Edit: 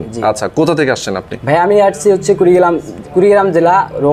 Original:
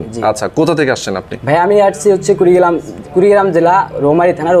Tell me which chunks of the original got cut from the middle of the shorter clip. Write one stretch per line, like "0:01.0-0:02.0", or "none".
none